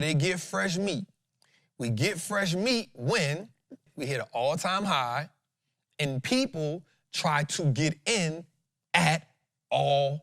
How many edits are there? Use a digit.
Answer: 1